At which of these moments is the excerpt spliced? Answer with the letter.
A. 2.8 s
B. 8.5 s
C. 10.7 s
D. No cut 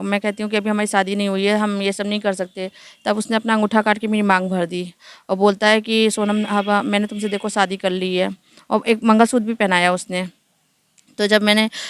D